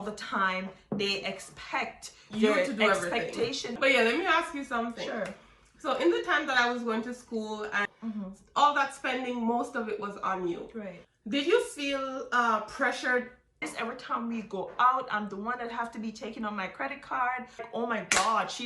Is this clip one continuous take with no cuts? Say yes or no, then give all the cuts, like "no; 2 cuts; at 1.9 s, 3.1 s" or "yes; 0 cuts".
no; 5 cuts; at 3.7 s, 7.8 s, 11.0 s, 13.6 s, 17.7 s